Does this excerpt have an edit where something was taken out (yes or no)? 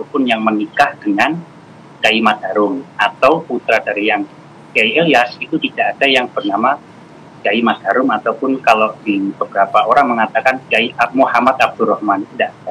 no